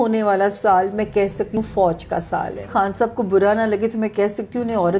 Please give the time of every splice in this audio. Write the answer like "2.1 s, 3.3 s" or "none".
1.6 s, 2.7 s